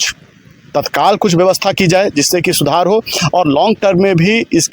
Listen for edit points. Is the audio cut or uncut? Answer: uncut